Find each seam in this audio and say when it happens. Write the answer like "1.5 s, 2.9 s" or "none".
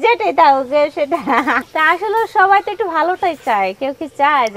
1.6 s